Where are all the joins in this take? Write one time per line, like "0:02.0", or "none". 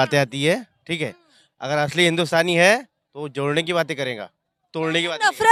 none